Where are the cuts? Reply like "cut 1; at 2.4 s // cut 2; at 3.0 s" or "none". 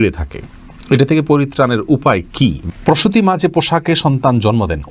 cut 1; at 2.7 s